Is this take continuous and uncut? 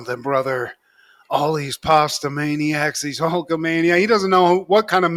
yes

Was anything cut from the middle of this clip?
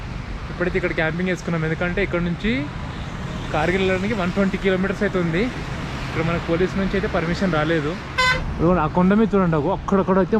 yes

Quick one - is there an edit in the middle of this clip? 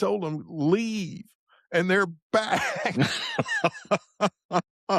no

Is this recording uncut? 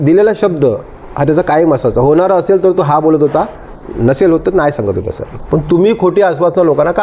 yes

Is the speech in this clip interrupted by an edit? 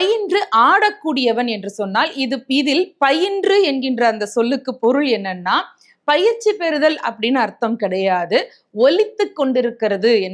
no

